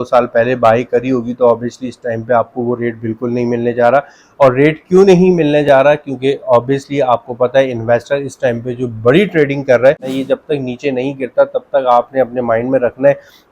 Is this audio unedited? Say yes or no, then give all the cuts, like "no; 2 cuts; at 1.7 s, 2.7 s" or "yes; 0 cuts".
no; 1 cut; at 10.1 s